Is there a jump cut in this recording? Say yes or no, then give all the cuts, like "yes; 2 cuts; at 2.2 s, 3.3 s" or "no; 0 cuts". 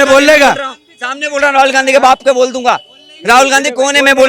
no; 0 cuts